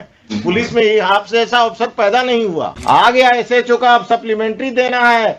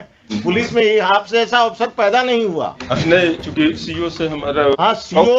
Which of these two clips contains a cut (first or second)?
first